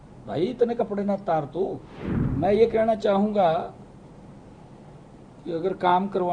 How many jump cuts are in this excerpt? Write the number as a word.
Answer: one